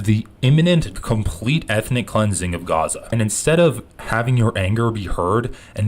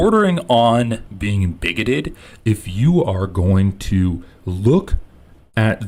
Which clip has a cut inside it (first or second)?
first